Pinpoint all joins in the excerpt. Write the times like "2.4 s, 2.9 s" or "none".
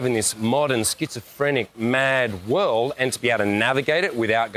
none